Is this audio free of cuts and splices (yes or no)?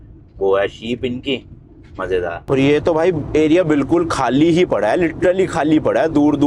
no